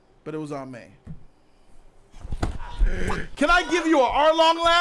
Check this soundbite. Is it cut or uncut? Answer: cut